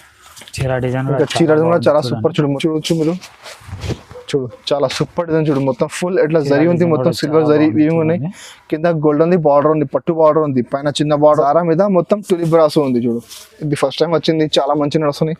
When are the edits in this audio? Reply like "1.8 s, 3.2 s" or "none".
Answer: 2.5 s, 11.3 s

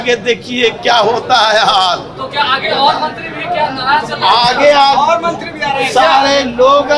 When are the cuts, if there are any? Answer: none

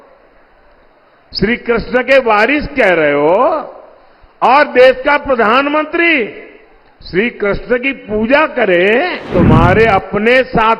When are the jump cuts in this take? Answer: 9.3 s

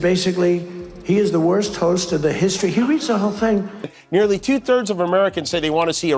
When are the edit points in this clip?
3.9 s

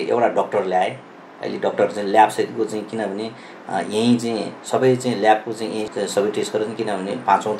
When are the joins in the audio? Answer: 5.9 s

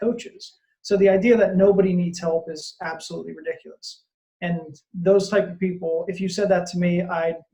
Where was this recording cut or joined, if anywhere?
none

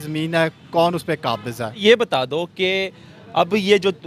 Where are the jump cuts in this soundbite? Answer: none

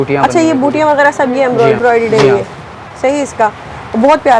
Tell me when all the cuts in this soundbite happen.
1.8 s

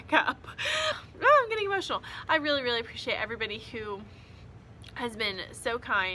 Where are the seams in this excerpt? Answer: 0.9 s

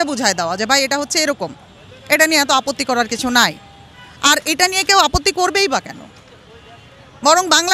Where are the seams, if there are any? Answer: none

